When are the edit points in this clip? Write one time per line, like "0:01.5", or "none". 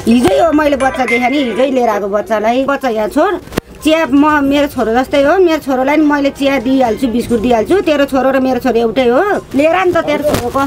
0:02.7
0:09.4